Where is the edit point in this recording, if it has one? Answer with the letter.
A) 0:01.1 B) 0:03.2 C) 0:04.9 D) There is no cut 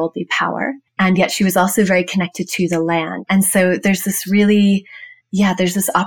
B